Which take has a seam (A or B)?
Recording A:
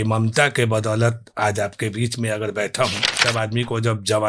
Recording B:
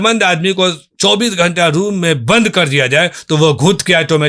A